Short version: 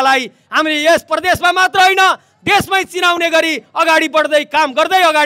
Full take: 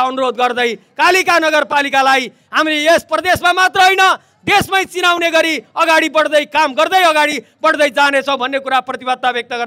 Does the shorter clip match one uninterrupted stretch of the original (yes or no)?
yes